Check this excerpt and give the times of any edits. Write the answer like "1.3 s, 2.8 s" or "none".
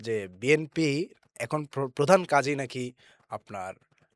none